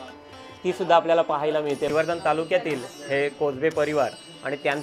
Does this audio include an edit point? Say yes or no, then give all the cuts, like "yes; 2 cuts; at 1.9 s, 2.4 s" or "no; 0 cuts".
yes; 1 cut; at 1.9 s